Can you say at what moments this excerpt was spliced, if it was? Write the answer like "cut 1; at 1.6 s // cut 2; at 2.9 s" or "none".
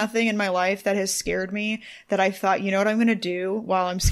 none